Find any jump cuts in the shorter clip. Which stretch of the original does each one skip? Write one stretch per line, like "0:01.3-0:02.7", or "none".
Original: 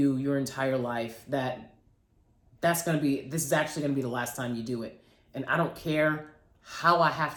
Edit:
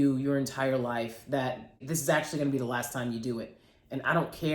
0:01.9-0:03.3